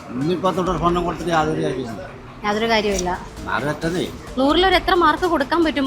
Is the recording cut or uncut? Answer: cut